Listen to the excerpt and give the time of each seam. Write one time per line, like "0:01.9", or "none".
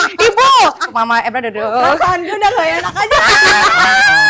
0:00.9